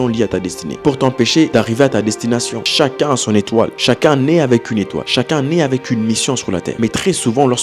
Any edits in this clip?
yes; 4 cuts; at 1.5 s, 2.6 s, 5.0 s, 6.7 s

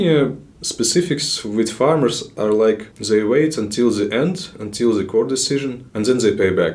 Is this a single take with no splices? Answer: no; 2 cuts; at 2.9 s, 5.8 s

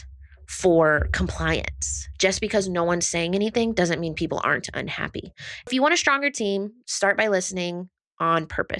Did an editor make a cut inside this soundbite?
yes; 2 cuts; at 2.0 s, 5.7 s

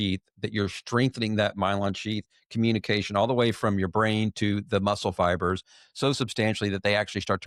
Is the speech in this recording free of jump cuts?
yes; 0 cuts

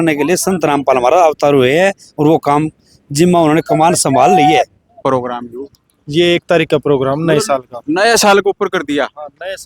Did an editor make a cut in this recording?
yes; 1 cut; at 5.0 s

